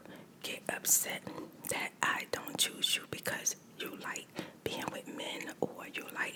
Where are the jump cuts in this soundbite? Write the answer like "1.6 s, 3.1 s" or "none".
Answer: none